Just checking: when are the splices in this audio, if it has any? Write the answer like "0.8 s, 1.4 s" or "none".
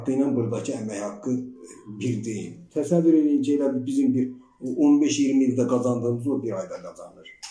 2.6 s